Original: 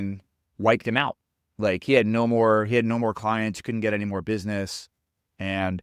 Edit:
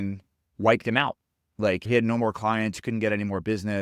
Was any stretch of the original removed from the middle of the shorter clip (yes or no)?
yes